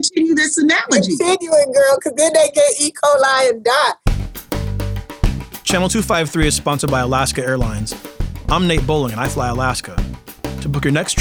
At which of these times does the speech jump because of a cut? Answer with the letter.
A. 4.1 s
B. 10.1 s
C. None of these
A